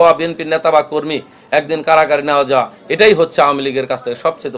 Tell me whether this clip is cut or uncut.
uncut